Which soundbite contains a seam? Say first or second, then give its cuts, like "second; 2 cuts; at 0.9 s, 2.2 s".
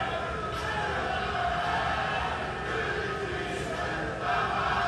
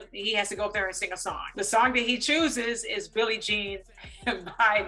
second; 1 cut; at 1.5 s